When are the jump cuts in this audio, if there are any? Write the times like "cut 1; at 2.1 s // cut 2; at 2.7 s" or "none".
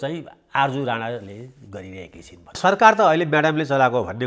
cut 1; at 2.6 s